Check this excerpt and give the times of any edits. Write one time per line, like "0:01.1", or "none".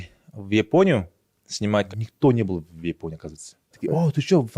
0:01.9
0:03.7